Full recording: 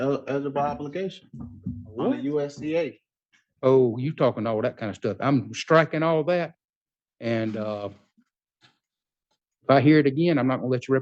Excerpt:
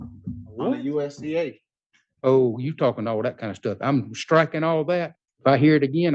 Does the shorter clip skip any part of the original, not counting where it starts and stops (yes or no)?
yes